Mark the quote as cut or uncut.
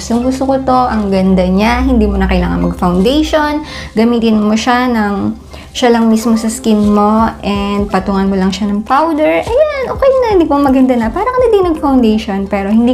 uncut